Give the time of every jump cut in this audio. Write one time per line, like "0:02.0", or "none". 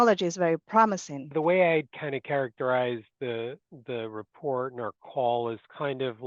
0:01.3